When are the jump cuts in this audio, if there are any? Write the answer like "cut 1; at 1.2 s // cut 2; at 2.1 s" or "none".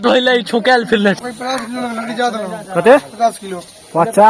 cut 1; at 1.2 s